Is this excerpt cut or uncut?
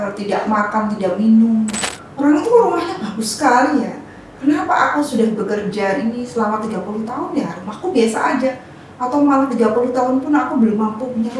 cut